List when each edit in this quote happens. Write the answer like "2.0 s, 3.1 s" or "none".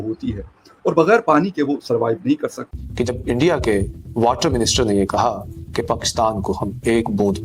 2.7 s